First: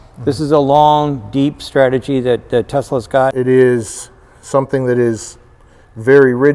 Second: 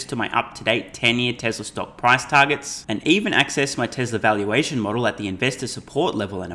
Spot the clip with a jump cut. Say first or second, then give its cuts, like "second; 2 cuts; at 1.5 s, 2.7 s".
first; 1 cut; at 3.3 s